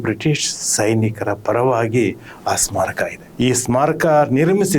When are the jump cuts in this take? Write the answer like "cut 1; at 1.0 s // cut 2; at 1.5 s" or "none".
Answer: cut 1; at 3.2 s